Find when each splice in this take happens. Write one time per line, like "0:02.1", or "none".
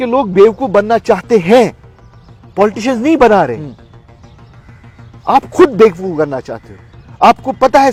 none